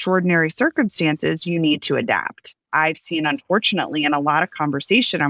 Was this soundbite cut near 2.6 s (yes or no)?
yes